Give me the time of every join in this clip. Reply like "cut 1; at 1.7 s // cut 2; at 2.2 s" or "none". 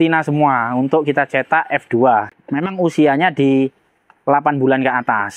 cut 1; at 2.4 s